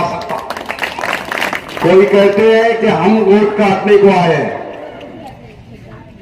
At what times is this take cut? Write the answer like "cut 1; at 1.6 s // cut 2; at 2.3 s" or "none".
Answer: cut 1; at 1.5 s